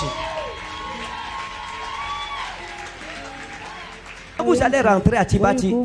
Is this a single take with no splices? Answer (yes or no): no